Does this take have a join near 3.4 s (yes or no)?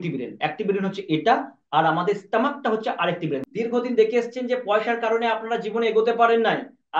yes